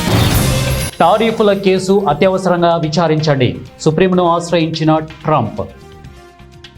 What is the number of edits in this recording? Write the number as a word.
one